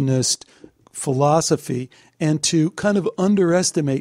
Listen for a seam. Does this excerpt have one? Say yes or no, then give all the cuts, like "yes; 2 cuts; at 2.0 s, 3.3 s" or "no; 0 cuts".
no; 0 cuts